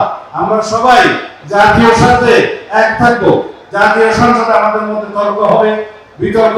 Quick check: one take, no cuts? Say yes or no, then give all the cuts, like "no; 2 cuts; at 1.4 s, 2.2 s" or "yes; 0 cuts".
yes; 0 cuts